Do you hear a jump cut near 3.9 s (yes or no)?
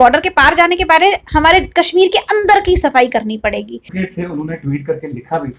yes